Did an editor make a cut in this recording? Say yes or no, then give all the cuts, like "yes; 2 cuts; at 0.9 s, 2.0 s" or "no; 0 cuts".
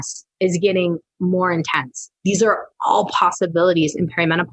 yes; 1 cut; at 2.4 s